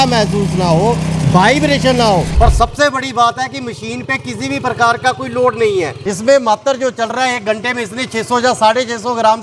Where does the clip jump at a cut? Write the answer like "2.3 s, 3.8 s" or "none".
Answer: 2.3 s, 6.0 s